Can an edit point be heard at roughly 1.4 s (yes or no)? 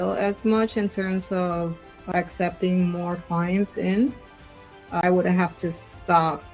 no